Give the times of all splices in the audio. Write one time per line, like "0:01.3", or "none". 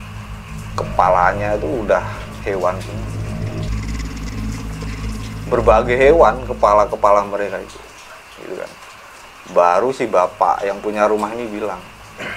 none

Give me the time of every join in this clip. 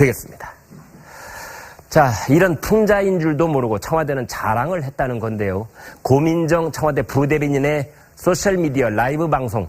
0:08.0

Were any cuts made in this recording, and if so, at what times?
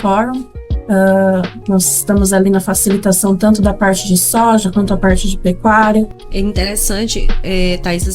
0:06.2

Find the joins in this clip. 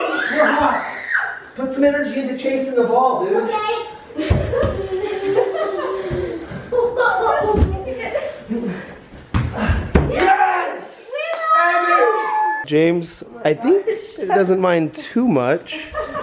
0:12.6

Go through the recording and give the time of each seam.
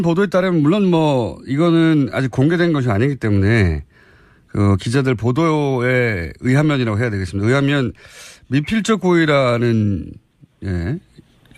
0:01.5

